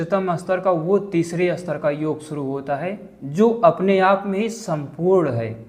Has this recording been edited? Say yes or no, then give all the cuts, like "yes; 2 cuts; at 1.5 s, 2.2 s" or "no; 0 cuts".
no; 0 cuts